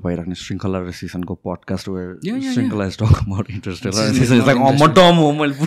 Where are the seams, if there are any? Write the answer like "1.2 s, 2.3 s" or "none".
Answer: none